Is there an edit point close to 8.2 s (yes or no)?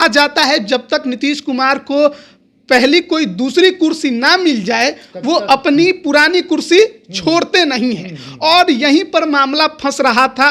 no